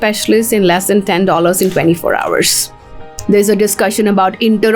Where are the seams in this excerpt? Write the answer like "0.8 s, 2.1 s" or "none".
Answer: 3.1 s